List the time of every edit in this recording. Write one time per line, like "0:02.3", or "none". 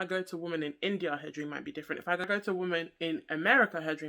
0:02.2